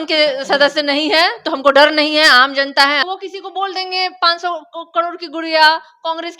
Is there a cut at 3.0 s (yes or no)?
yes